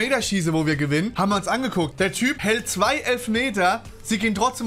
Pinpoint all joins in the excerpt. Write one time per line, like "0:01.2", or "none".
0:01.1
0:02.2